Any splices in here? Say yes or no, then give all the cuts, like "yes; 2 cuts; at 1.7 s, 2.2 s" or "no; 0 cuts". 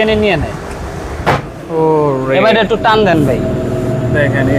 no; 0 cuts